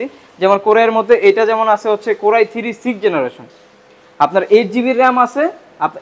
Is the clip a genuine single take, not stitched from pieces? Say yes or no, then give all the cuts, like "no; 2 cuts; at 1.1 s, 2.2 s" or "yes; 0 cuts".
yes; 0 cuts